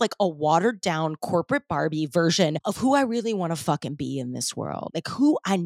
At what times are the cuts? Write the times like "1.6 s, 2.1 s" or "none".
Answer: 2.6 s, 4.9 s